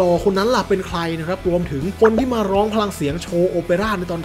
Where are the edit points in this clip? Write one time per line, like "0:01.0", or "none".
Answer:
none